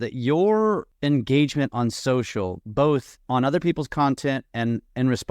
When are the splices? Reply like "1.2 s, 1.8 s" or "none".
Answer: 0.9 s